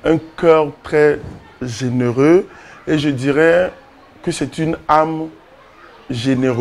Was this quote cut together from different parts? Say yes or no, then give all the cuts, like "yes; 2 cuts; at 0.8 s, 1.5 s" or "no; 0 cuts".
no; 0 cuts